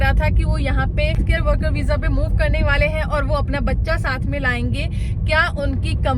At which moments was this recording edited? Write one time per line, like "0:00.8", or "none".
0:01.2

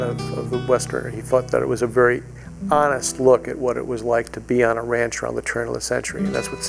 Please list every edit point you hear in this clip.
none

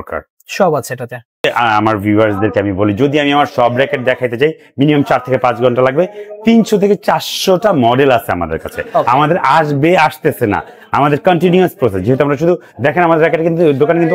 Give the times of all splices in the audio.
0:01.4

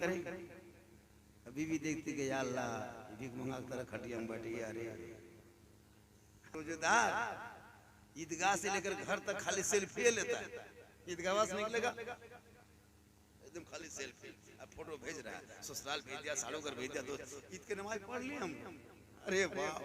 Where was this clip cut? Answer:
0:06.5

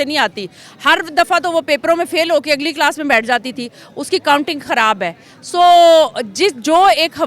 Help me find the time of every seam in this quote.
none

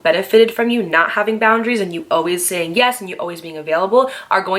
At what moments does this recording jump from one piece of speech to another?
none

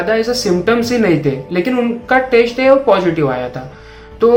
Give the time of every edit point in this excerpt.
none

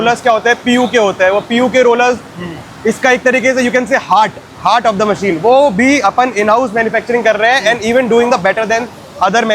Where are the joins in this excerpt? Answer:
none

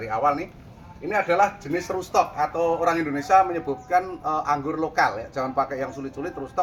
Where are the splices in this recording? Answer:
none

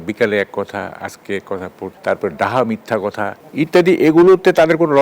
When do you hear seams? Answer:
0:02.0
0:03.4

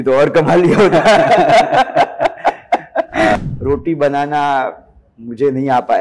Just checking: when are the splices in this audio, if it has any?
0:03.4

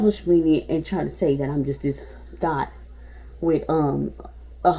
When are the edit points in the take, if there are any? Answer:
none

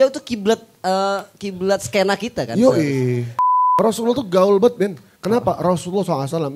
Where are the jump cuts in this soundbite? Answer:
0:03.4

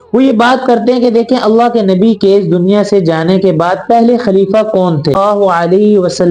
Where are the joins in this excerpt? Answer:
0:05.2

